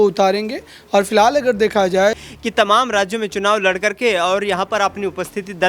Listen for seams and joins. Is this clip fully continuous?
no; 1 cut; at 2.2 s

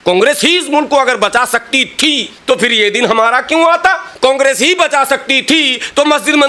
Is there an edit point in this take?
yes; 2 cuts; at 2.3 s, 4.1 s

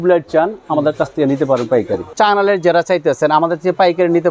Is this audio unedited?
no; 1 cut; at 2.0 s

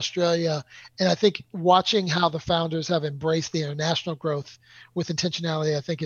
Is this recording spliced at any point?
no; 0 cuts

